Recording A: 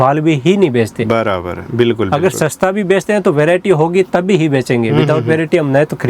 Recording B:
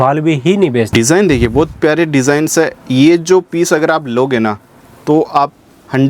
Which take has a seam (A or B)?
B